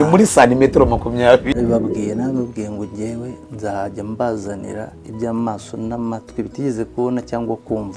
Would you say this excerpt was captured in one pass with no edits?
no; 1 cut; at 1.4 s

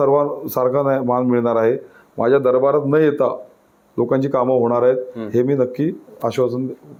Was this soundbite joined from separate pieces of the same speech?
no; 0 cuts

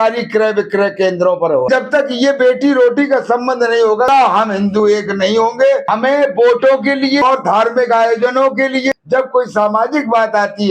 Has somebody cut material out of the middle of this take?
yes; 5 cuts; at 1.7 s, 4.1 s, 5.8 s, 7.2 s, 8.9 s

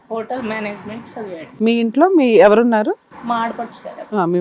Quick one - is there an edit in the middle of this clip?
yes; 2 cuts; at 1.5 s, 3.1 s

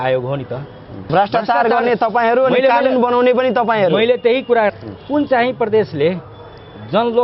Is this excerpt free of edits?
no; 2 cuts; at 1.0 s, 4.7 s

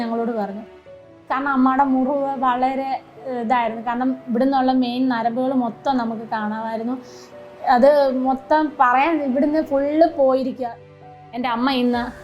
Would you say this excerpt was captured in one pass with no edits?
no; 2 cuts; at 1.0 s, 10.9 s

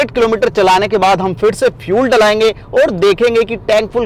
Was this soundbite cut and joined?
no; 0 cuts

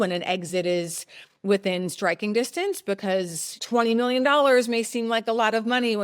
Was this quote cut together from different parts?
yes; 1 cut; at 3.5 s

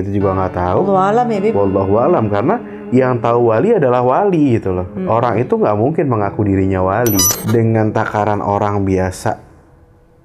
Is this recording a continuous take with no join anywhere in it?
no; 1 cut; at 7.3 s

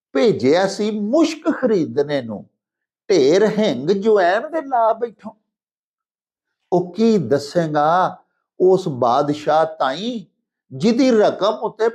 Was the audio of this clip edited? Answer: no; 0 cuts

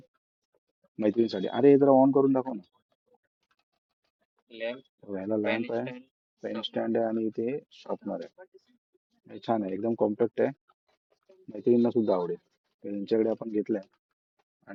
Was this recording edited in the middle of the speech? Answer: no; 0 cuts

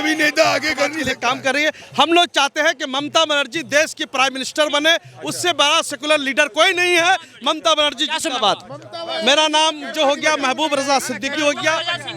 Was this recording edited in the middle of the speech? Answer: yes; 1 cut; at 1.1 s

